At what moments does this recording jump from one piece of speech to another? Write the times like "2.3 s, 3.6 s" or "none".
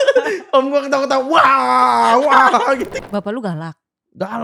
2.9 s